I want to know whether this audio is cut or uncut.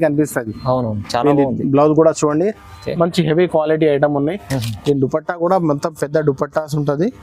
uncut